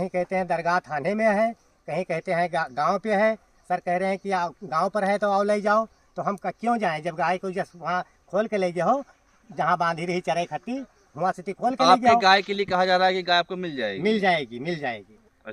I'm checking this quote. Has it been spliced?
no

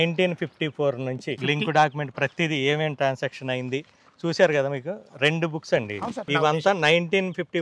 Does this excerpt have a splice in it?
yes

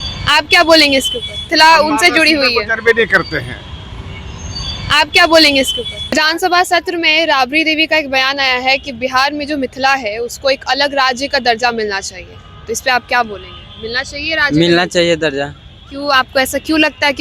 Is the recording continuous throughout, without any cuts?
no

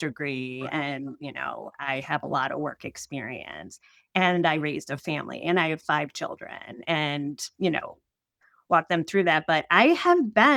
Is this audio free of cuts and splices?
yes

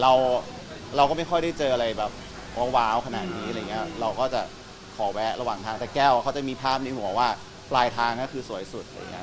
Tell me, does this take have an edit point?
no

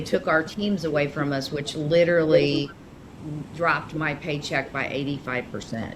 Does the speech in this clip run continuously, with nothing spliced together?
yes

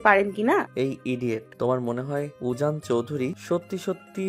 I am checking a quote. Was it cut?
yes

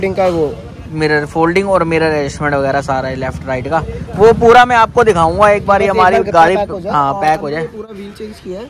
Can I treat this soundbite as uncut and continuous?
yes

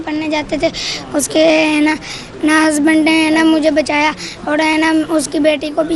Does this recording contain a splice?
no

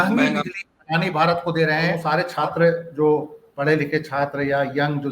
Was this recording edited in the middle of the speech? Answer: yes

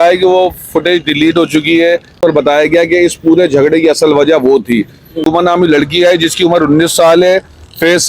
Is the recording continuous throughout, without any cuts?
no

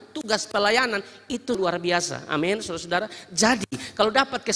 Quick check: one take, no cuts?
no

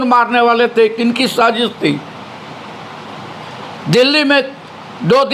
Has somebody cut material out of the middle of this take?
no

